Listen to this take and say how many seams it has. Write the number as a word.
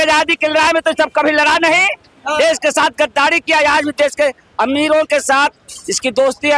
zero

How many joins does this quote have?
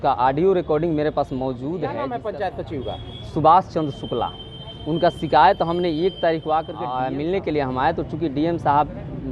two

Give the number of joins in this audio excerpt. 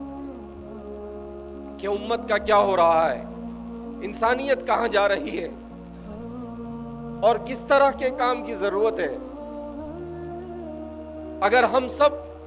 four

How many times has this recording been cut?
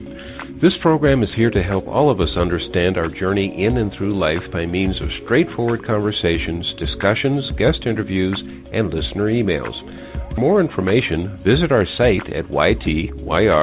one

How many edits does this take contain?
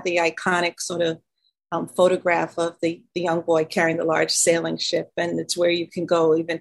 zero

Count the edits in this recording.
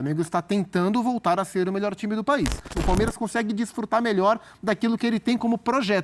one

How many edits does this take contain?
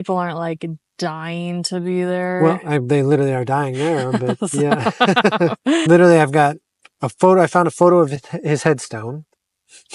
one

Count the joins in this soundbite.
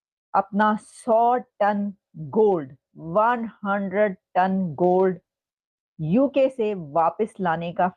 zero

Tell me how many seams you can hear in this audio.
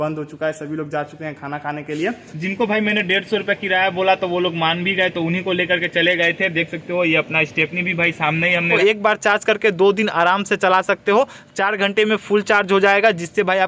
two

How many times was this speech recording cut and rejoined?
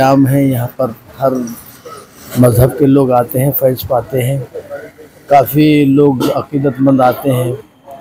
zero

